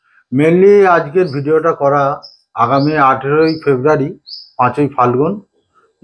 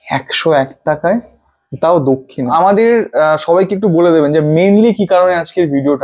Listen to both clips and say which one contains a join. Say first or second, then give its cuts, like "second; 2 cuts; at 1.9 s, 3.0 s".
second; 1 cut; at 2.5 s